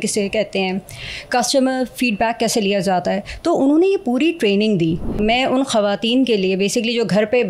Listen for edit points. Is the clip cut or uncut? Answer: cut